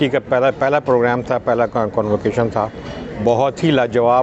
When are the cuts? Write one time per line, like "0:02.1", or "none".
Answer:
none